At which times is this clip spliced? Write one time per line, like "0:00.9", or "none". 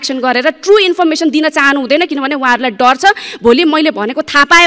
none